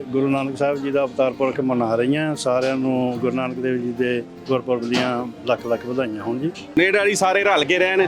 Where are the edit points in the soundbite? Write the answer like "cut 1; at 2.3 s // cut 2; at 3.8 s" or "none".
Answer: cut 1; at 6.8 s